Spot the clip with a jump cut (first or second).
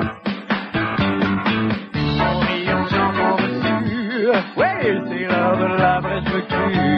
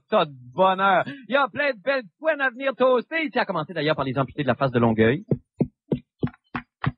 second